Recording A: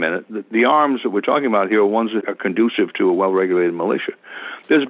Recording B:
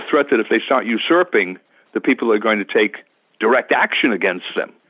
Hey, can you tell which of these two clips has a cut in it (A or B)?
A